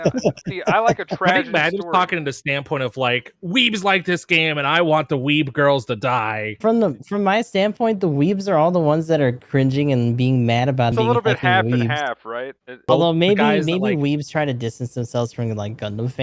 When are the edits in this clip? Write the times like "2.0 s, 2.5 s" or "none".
6.5 s, 10.9 s, 12.8 s